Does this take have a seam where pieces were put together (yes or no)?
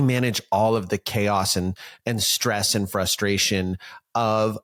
no